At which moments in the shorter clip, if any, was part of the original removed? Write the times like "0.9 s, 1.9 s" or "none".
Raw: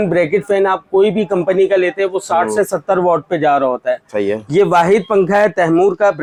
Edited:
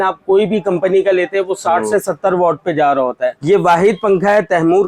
3.4 s